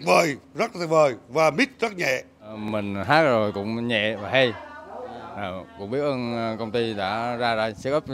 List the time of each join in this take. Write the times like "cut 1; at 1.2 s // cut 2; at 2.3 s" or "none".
cut 1; at 2.6 s